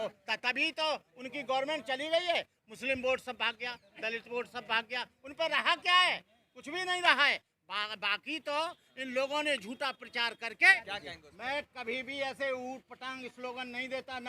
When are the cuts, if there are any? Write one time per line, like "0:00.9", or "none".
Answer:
0:10.6